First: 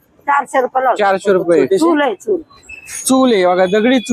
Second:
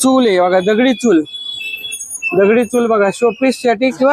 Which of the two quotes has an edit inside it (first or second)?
first